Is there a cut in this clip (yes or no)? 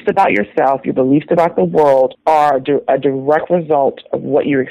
yes